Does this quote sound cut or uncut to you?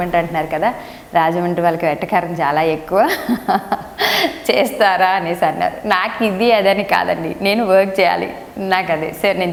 uncut